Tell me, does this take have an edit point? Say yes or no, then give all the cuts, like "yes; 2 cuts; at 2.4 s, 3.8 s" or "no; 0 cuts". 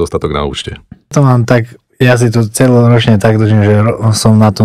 yes; 1 cut; at 1.1 s